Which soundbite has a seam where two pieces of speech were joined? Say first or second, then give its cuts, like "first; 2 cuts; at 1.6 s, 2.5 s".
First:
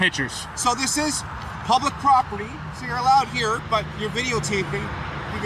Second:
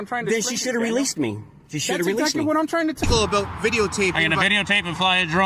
second; 1 cut; at 3.0 s